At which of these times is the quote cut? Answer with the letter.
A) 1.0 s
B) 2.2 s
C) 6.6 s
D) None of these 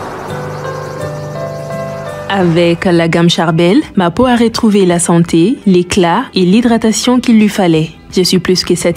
B